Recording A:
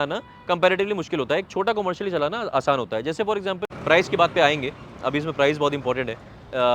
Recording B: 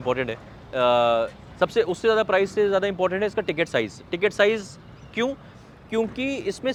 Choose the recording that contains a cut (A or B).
A